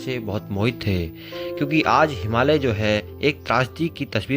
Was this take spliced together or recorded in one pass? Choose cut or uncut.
cut